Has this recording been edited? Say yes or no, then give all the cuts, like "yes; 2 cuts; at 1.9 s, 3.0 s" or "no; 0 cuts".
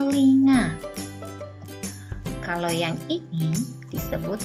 no; 0 cuts